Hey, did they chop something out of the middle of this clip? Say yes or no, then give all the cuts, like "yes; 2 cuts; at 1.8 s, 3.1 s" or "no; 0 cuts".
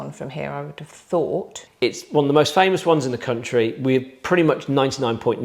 yes; 1 cut; at 1.6 s